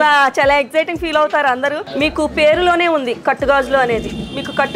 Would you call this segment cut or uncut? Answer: cut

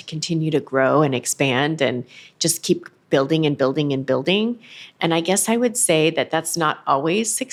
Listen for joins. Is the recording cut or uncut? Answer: uncut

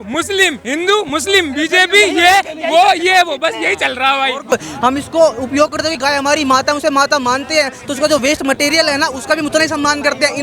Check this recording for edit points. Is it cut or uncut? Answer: cut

